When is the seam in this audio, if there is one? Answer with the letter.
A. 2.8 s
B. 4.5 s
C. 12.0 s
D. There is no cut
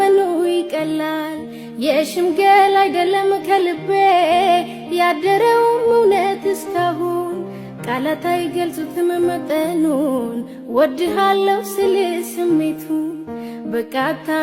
D